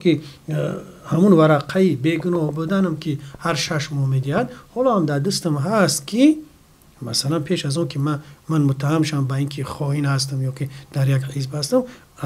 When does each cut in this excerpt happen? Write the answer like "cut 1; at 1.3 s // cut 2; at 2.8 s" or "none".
none